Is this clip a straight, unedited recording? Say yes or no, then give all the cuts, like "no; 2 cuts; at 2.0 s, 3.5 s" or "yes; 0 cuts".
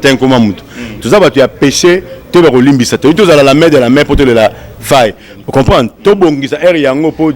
no; 1 cut; at 5.3 s